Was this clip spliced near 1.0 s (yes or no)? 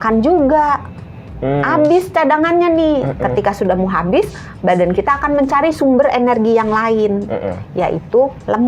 no